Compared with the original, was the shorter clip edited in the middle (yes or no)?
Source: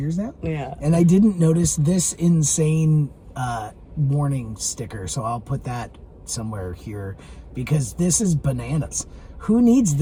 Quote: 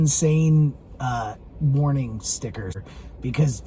yes